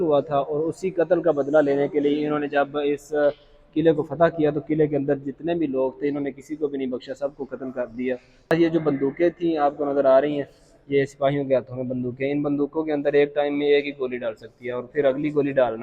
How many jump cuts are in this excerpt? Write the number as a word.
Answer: one